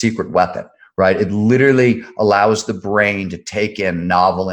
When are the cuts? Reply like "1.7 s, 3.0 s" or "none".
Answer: none